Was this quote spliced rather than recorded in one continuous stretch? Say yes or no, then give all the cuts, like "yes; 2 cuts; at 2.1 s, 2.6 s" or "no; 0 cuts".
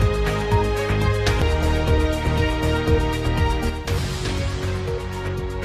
no; 0 cuts